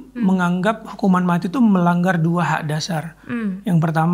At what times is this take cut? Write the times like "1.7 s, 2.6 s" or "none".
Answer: none